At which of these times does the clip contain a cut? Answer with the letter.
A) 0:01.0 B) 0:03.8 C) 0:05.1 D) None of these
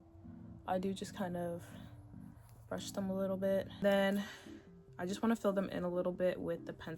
B